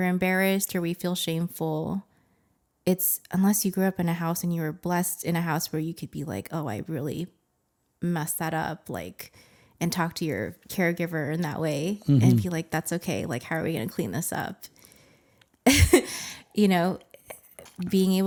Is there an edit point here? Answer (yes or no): no